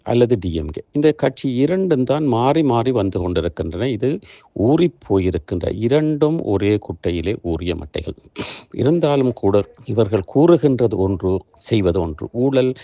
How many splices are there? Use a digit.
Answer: 0